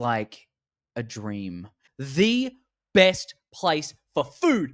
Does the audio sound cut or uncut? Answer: cut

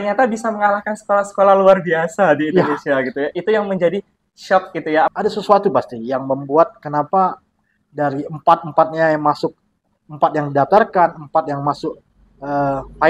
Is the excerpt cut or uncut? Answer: cut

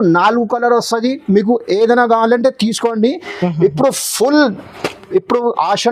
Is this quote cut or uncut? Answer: uncut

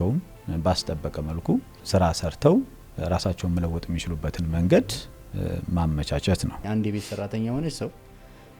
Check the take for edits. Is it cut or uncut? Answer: cut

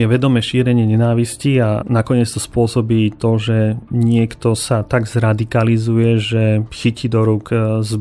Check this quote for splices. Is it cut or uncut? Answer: uncut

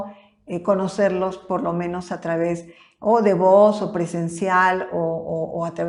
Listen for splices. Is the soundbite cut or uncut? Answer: uncut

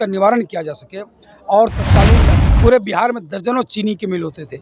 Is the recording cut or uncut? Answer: cut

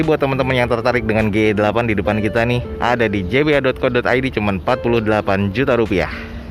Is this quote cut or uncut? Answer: uncut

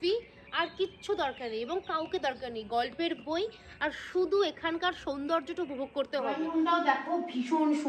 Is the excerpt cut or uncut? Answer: cut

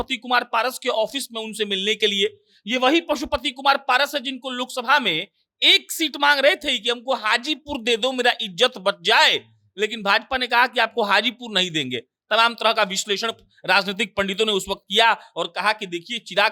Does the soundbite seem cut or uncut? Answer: uncut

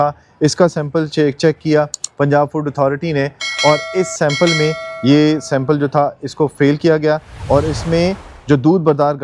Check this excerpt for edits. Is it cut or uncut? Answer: uncut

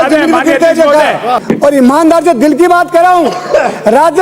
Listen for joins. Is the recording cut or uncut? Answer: cut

